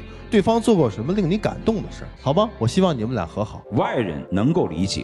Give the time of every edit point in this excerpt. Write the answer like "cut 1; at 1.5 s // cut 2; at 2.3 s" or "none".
cut 1; at 3.6 s